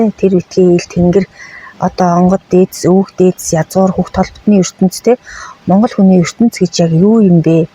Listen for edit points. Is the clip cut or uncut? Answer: uncut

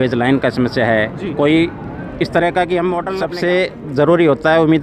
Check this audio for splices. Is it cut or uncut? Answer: cut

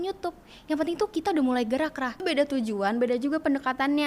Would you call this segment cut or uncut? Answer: cut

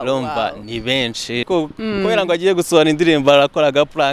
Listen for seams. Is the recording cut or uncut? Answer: cut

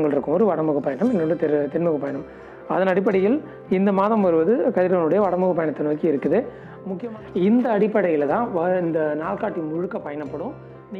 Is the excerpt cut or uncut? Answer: cut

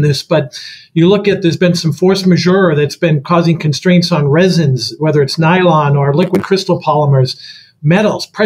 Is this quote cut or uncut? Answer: uncut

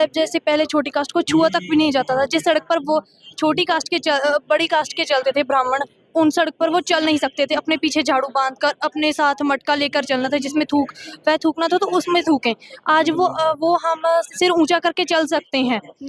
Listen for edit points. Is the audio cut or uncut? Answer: uncut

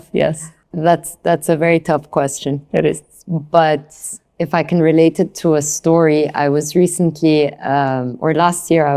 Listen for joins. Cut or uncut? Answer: uncut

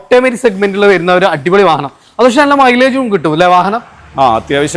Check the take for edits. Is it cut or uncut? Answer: uncut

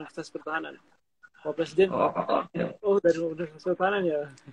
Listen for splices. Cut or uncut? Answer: uncut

